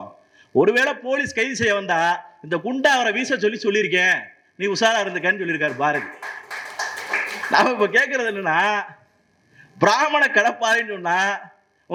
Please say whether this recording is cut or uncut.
uncut